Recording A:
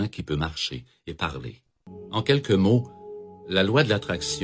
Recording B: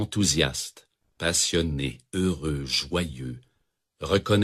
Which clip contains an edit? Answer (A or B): A